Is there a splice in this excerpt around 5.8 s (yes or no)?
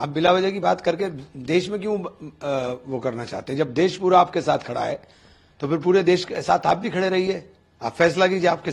no